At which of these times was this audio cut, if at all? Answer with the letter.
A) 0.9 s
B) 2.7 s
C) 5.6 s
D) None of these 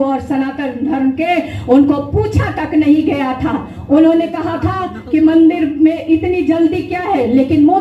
D